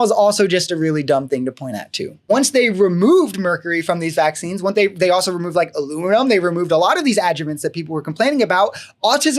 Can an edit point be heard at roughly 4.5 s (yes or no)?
no